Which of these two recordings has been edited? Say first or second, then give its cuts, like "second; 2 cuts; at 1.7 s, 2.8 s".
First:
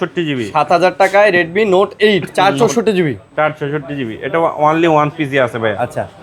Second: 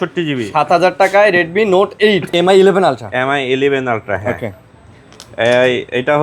second; 1 cut; at 2.3 s